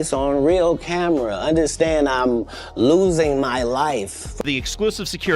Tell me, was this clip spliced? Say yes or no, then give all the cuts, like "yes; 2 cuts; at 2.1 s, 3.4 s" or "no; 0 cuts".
yes; 1 cut; at 4.0 s